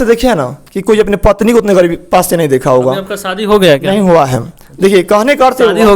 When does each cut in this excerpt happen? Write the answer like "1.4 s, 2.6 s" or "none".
none

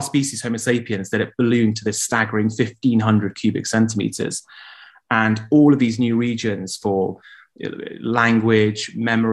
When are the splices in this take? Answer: none

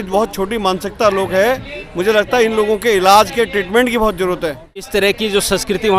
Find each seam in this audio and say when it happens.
4.9 s

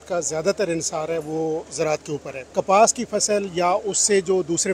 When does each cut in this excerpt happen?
2.3 s

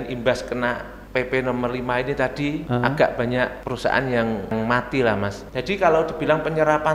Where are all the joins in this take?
0.9 s, 2.6 s, 3.6 s, 4.5 s, 5.4 s

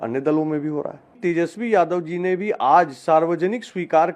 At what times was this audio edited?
1.2 s

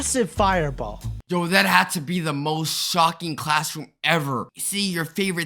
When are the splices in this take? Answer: 1.2 s

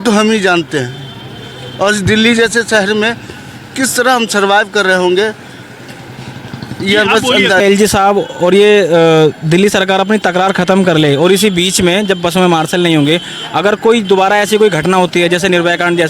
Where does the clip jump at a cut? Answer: 7.6 s

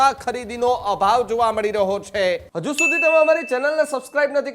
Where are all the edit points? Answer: 2.5 s

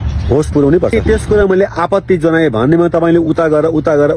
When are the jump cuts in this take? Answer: 0.9 s

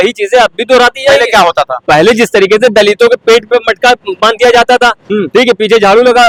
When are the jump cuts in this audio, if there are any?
none

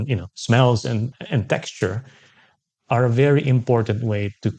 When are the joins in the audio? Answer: 1.1 s

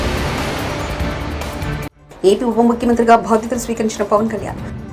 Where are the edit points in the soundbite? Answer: 2.0 s

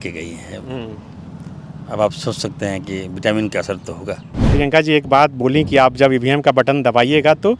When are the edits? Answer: 4.5 s

